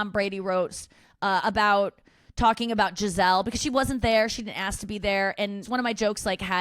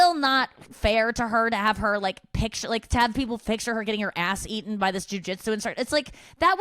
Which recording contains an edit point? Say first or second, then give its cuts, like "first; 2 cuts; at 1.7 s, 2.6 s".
first; 1 cut; at 5.6 s